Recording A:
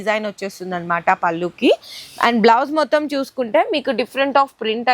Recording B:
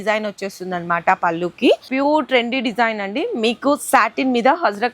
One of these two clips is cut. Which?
B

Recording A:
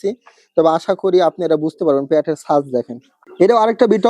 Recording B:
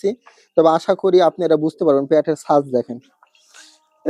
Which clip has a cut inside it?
A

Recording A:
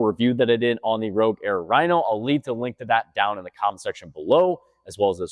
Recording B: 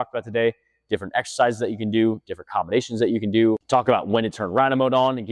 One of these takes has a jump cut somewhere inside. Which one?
B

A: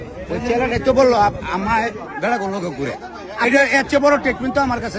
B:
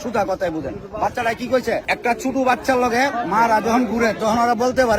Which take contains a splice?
B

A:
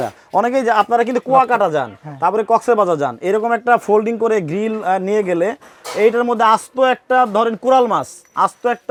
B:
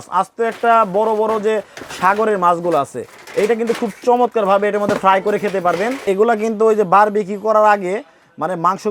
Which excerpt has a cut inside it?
B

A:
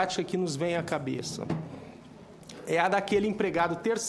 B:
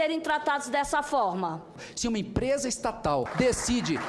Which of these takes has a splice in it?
B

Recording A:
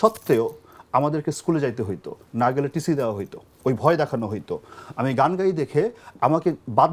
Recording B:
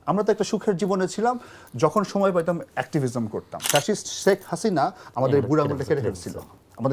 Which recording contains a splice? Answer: B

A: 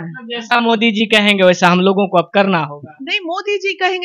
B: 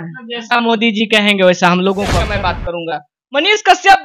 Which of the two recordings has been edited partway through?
B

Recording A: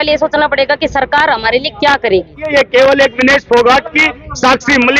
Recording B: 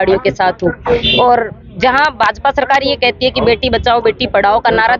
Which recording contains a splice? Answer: A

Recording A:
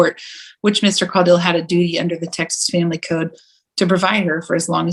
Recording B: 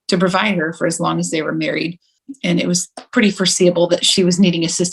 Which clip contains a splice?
B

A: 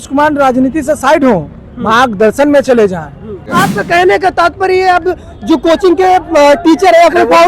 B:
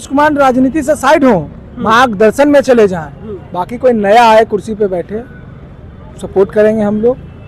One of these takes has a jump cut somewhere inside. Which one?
A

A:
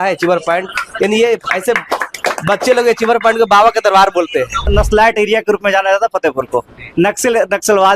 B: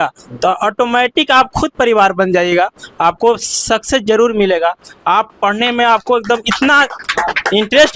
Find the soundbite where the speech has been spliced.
A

